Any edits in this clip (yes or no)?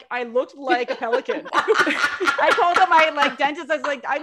no